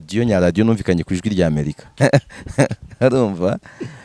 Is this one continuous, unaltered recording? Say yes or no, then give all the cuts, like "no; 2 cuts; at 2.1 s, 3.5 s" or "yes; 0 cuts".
no; 1 cut; at 1.8 s